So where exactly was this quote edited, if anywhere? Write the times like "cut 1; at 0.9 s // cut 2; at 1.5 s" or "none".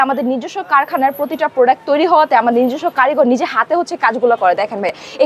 none